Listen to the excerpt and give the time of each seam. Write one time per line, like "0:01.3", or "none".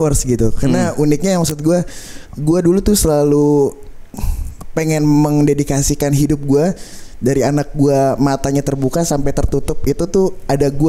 none